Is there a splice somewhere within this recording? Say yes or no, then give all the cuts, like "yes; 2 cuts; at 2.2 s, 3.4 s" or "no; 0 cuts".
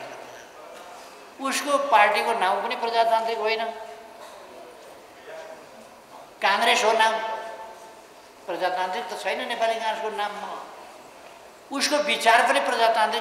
no; 0 cuts